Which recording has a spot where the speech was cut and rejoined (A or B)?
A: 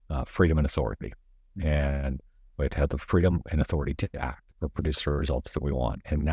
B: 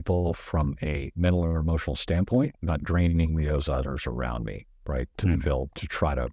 B